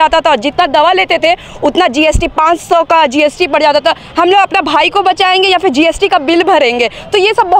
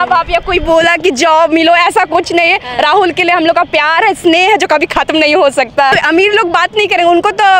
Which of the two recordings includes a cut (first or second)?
second